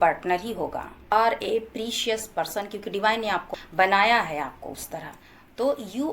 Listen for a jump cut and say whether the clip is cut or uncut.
cut